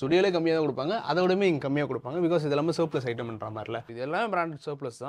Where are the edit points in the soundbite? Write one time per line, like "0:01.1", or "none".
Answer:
0:03.9